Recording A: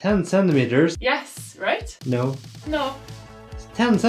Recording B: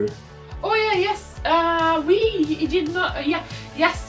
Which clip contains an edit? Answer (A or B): A